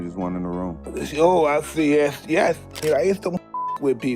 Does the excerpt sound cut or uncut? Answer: cut